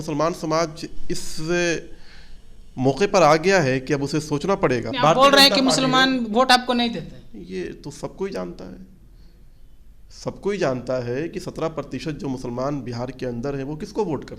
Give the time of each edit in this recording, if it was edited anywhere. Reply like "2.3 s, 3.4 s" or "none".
4.9 s